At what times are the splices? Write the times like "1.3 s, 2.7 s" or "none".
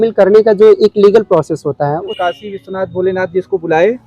2.0 s